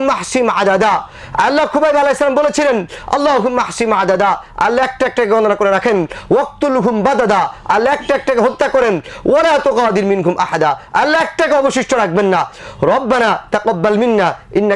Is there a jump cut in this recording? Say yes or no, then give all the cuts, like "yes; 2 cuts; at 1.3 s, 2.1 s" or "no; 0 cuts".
no; 0 cuts